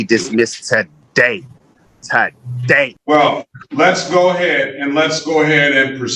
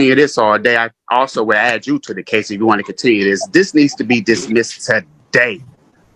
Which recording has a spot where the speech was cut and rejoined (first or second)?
first